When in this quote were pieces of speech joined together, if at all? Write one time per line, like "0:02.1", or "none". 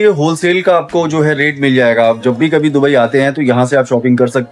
none